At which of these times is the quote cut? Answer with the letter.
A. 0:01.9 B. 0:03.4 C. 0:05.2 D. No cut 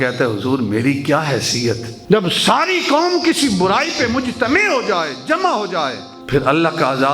A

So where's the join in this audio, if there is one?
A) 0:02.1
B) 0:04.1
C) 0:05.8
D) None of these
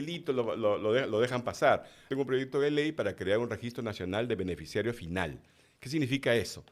A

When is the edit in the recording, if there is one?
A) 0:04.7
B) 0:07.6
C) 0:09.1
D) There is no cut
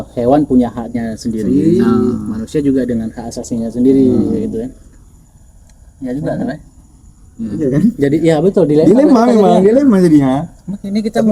D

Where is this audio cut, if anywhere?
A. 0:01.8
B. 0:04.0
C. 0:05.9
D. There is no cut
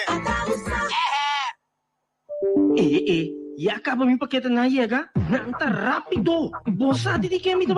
A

